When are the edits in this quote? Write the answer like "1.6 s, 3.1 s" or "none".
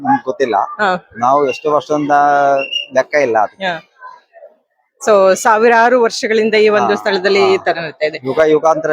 none

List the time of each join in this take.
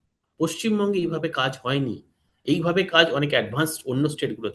none

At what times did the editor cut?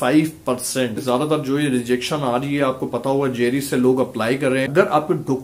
1.0 s, 4.7 s

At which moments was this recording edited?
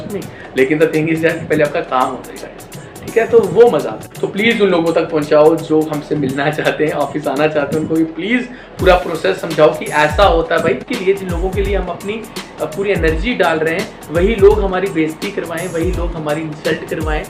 4.1 s, 10.8 s

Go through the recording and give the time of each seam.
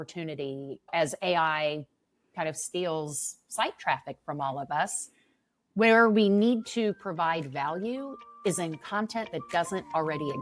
none

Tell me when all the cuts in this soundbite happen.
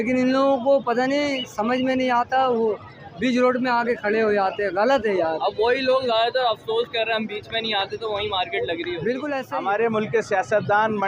9.4 s

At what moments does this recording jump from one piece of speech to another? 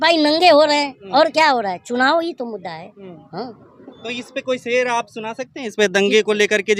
none

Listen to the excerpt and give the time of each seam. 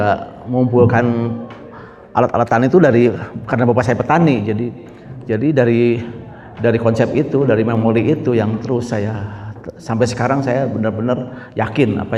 none

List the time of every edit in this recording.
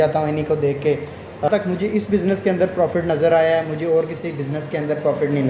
1.5 s

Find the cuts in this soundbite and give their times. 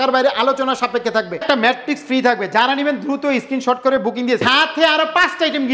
1.4 s, 4.5 s

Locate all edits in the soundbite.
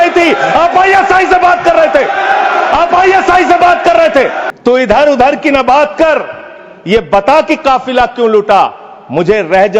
4.4 s

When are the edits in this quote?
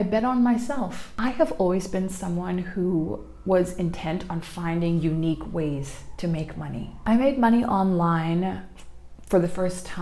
1.0 s

